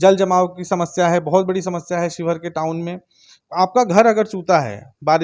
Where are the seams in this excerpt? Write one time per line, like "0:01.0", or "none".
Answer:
0:03.3